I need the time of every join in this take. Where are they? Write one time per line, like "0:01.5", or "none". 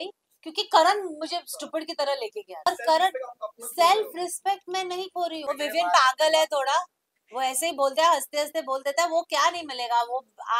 0:02.7
0:05.4